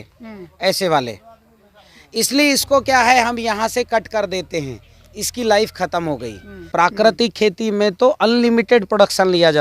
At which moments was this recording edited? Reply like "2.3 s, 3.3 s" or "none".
6.6 s